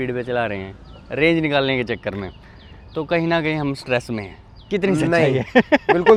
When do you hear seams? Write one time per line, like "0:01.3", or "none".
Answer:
none